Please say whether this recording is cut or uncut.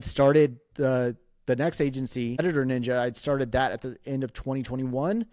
cut